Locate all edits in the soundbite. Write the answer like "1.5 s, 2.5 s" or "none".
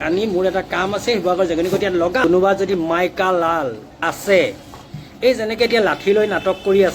2.2 s, 3.9 s